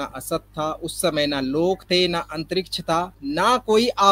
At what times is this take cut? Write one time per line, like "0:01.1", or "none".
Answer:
0:03.2